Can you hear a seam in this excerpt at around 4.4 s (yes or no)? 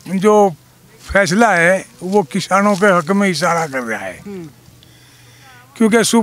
no